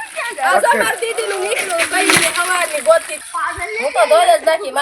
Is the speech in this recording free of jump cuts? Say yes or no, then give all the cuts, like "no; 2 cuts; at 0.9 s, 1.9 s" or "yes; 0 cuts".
no; 1 cut; at 3.2 s